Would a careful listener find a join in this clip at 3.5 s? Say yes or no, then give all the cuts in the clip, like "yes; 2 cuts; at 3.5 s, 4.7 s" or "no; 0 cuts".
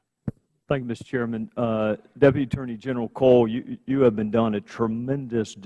yes; 1 cut; at 3.5 s